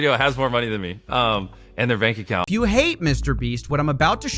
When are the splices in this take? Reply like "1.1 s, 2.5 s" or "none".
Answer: 2.5 s